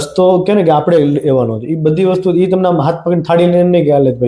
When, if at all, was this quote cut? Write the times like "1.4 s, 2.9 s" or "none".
none

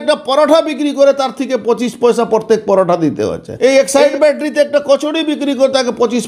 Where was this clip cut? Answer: 3.4 s

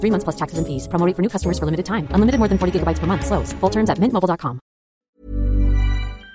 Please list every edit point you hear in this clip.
5.1 s

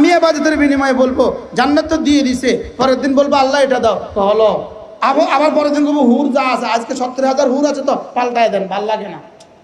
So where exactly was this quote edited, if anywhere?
none

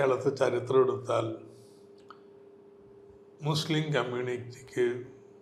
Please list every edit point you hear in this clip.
none

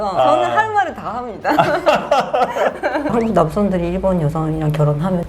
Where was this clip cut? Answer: 3.1 s

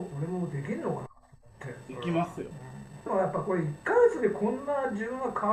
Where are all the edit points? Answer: 3.1 s

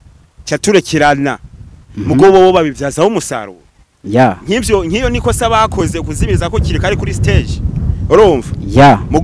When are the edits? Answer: none

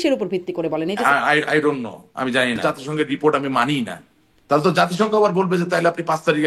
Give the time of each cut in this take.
1.0 s, 2.6 s

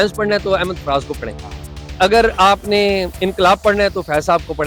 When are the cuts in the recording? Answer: none

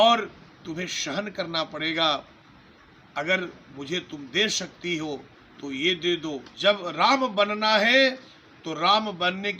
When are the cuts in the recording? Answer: 6.5 s

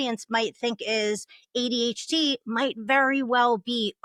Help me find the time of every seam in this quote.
none

